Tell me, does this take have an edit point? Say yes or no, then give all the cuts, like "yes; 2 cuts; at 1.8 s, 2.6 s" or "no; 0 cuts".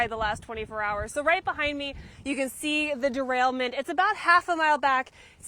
no; 0 cuts